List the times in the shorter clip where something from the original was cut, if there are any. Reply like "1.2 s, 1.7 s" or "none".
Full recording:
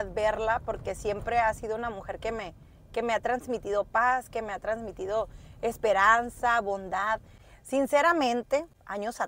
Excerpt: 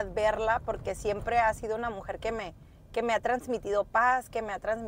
none